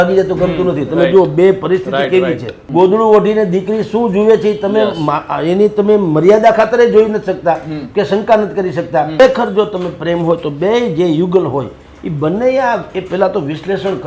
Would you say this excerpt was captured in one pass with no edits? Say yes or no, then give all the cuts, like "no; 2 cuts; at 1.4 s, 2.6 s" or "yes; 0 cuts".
no; 2 cuts; at 2.5 s, 9.2 s